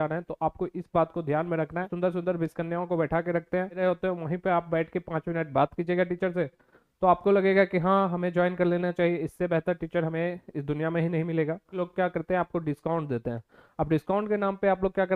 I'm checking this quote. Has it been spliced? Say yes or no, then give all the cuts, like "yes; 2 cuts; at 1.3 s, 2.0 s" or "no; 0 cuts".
yes; 3 cuts; at 1.9 s, 3.8 s, 11.7 s